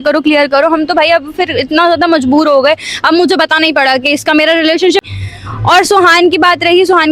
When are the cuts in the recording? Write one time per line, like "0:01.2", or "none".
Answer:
0:05.0